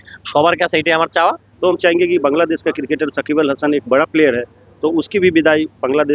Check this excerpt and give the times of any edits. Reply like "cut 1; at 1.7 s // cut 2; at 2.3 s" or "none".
cut 1; at 1.4 s